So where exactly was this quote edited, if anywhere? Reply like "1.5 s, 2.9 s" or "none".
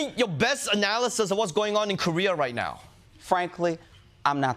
2.9 s